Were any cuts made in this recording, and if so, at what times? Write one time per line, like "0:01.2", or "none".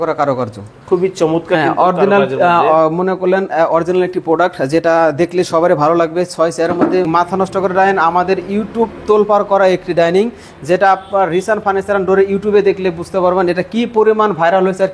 0:07.0